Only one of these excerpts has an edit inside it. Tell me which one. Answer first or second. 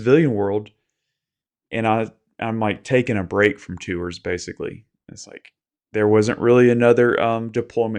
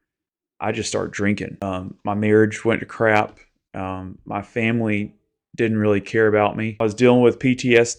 second